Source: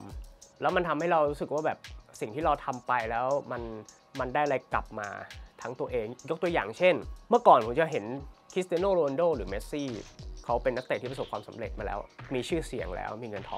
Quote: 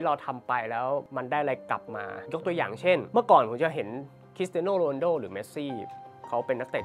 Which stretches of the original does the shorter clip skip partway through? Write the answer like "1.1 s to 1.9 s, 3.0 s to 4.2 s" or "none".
3.5 s to 4.1 s, 5.2 s to 6.2 s, 7.0 s to 7.2 s